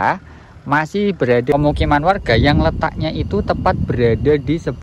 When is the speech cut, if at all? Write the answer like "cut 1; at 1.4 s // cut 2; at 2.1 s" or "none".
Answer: cut 1; at 1.5 s